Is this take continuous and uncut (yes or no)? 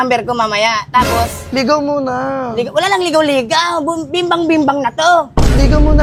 yes